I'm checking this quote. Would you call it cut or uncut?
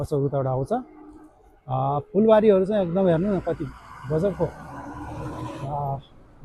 uncut